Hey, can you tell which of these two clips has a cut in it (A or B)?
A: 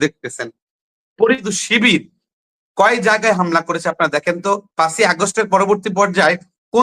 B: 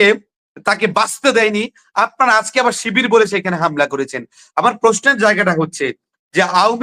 A